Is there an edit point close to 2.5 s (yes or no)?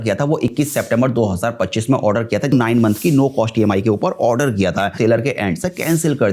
yes